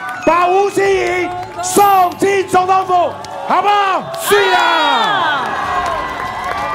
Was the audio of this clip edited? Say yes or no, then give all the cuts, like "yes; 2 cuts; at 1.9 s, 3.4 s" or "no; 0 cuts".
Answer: no; 0 cuts